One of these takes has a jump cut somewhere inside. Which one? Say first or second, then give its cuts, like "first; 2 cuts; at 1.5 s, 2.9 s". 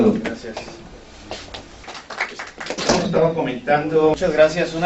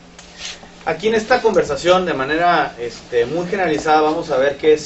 first; 1 cut; at 1.9 s